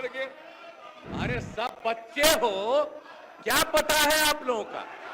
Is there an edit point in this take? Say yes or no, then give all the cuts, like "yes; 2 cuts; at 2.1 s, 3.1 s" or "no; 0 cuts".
yes; 1 cut; at 0.9 s